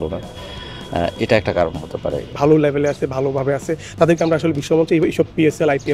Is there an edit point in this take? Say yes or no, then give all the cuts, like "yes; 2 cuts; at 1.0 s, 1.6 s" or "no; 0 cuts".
yes; 1 cut; at 2.3 s